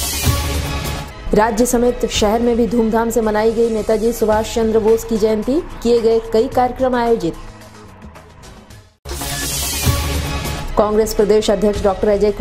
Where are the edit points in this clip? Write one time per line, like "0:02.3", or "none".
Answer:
0:01.1